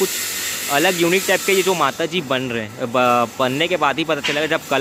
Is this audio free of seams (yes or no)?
yes